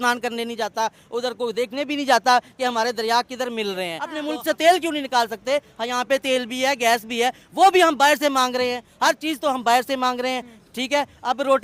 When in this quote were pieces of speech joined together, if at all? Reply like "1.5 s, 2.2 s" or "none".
4.1 s